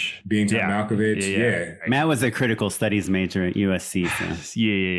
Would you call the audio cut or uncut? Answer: cut